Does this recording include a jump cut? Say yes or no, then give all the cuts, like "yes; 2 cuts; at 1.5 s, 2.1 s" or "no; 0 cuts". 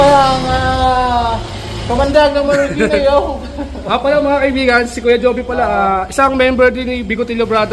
no; 0 cuts